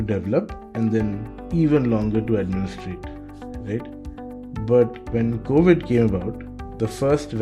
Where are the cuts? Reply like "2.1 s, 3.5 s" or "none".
5.0 s